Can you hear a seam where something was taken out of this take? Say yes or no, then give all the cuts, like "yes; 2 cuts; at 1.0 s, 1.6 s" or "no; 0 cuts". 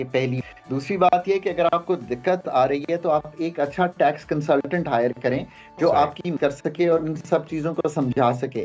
no; 0 cuts